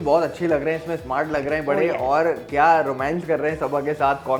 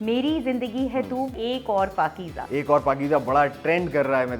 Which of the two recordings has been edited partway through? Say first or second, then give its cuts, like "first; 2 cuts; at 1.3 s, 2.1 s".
second; 2 cuts; at 1.4 s, 2.4 s